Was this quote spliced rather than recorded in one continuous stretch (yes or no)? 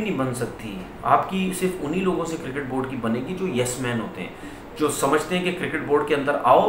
no